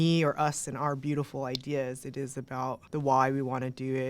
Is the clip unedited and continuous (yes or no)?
no